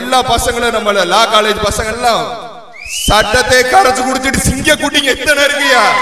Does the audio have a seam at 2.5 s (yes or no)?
no